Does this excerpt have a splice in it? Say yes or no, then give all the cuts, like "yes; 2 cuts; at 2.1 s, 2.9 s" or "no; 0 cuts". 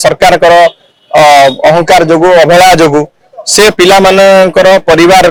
no; 0 cuts